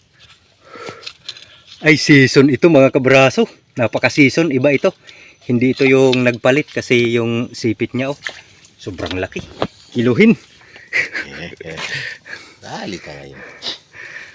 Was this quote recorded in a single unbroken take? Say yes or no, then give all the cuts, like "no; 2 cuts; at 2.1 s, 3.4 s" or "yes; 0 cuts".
yes; 0 cuts